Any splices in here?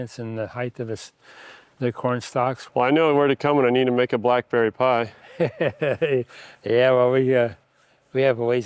yes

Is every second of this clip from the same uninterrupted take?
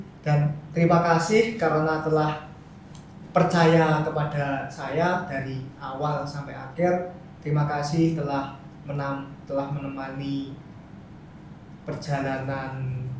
yes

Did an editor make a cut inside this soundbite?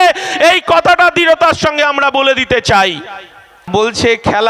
yes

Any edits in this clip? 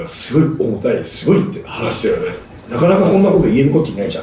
no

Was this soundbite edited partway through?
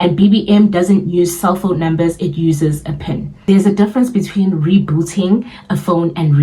yes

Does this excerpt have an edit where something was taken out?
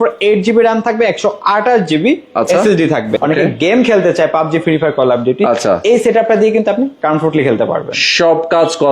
yes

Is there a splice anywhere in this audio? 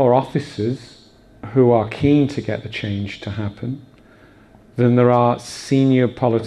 yes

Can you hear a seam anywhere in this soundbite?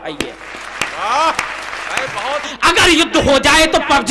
yes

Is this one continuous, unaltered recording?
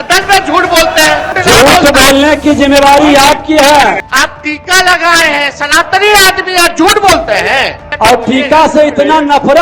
no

